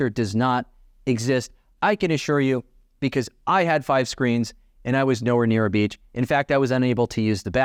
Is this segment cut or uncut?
uncut